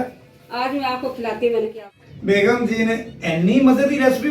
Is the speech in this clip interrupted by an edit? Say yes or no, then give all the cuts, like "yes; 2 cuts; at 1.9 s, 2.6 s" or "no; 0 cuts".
yes; 1 cut; at 1.6 s